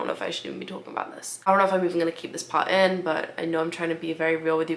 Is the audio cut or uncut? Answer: uncut